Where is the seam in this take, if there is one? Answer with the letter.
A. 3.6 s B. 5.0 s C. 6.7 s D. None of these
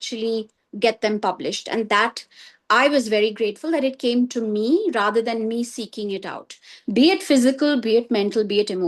C